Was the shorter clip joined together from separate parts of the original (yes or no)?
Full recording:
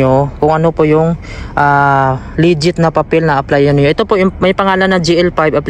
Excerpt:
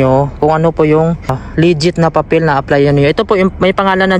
yes